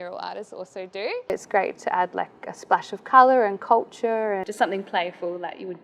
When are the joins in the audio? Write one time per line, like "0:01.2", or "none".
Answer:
0:01.3
0:04.5